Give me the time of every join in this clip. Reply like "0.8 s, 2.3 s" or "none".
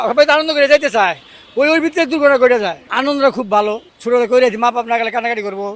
none